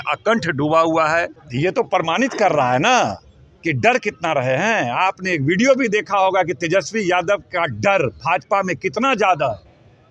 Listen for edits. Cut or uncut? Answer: cut